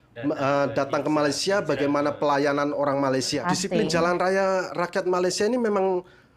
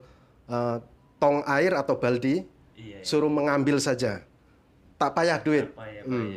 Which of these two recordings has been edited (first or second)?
first